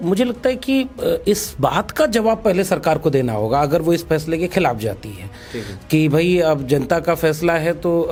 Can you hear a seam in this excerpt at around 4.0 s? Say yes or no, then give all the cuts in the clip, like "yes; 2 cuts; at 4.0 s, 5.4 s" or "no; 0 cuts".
no; 0 cuts